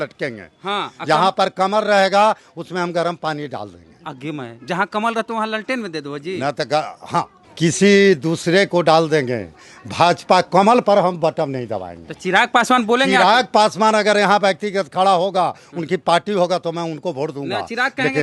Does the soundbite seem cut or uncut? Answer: cut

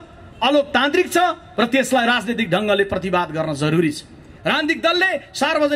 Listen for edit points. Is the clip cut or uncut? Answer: cut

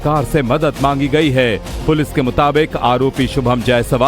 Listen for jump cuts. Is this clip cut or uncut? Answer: cut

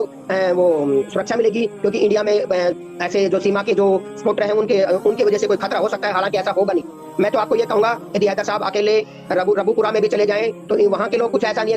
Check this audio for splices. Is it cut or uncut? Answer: uncut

